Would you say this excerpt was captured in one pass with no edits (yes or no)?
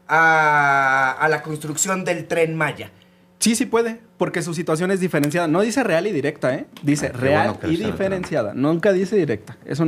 yes